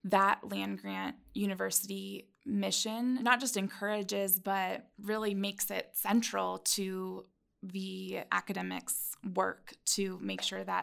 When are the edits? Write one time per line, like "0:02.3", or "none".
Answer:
0:03.2